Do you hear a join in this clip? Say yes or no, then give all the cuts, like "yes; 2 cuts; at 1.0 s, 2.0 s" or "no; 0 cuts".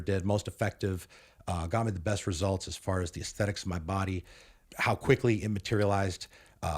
no; 0 cuts